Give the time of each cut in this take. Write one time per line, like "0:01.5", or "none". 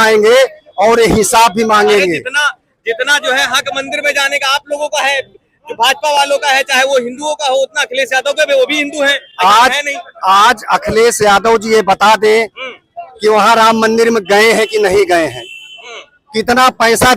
none